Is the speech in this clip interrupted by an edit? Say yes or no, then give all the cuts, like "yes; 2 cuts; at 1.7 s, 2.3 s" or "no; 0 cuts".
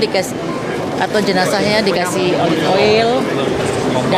no; 0 cuts